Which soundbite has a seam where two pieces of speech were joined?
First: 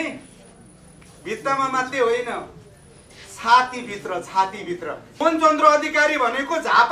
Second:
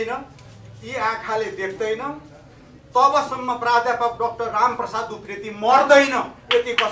first; 1 cut; at 5.2 s

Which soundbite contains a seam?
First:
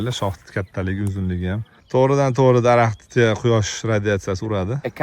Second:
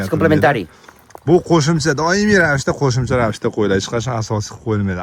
first; 1 cut; at 1.8 s

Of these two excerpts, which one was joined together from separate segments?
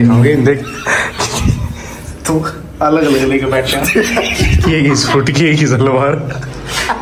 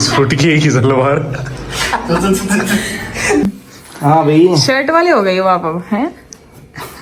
second; 1 cut; at 3.4 s

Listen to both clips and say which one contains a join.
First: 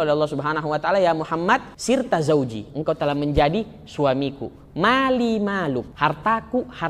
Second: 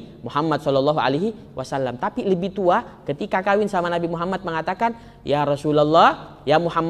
first; 2 cuts; at 1.7 s, 5.9 s

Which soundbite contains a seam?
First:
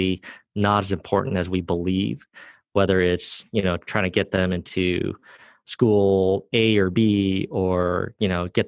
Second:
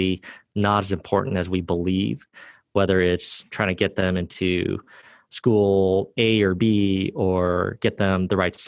second; 2 cuts; at 3.5 s, 7.7 s

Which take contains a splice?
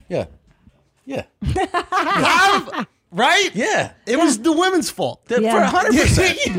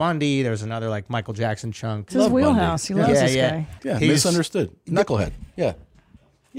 second; 2 cuts; at 2.0 s, 3.8 s

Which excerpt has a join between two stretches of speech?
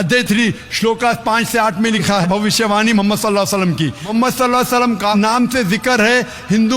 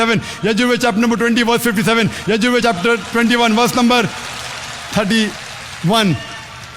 first; 1 cut; at 4.0 s

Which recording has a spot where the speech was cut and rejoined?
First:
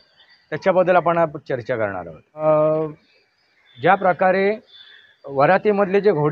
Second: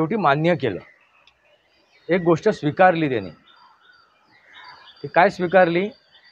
first; 1 cut; at 2.4 s

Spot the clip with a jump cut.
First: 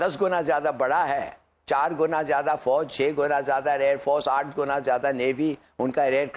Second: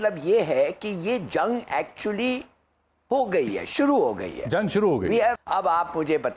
second; 1 cut; at 5.4 s

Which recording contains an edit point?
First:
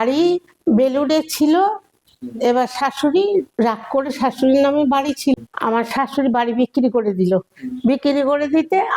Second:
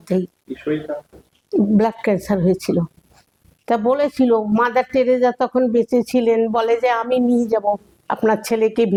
first; 1 cut; at 5.3 s

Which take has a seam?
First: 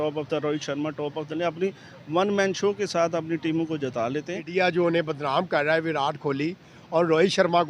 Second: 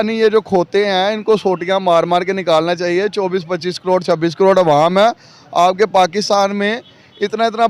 first; 1 cut; at 4.4 s

